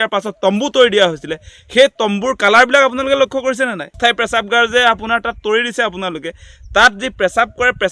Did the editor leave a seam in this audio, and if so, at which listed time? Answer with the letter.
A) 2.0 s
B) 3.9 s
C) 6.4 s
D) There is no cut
B